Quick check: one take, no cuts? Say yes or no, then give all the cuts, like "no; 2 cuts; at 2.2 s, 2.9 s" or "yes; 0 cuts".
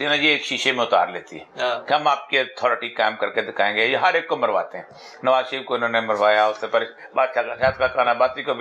yes; 0 cuts